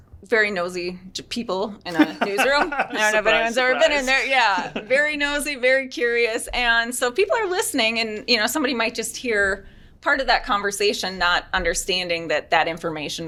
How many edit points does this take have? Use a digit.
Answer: 0